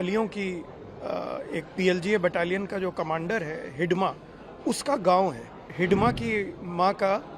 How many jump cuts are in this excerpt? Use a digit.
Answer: 1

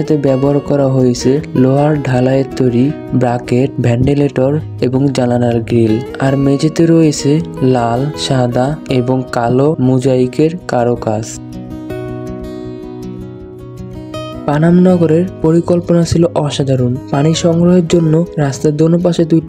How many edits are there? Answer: 0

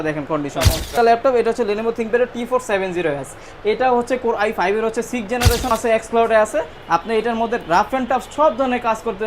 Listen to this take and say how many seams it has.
2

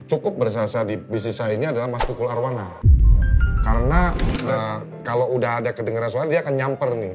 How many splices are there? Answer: 1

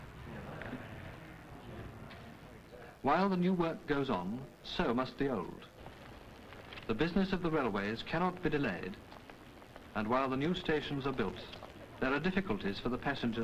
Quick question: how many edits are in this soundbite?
1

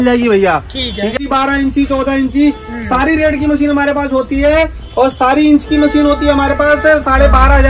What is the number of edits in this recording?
1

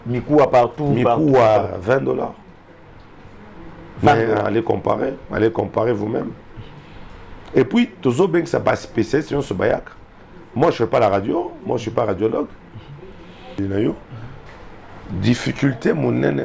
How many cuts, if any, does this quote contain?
1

